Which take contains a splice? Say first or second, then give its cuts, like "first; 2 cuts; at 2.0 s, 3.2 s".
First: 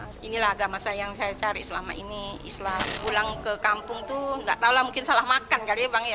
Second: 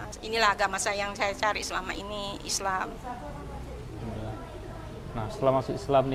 first; 1 cut; at 2.9 s